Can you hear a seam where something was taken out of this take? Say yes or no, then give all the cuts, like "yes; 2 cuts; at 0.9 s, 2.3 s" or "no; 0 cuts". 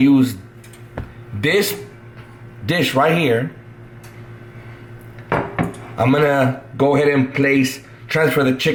no; 0 cuts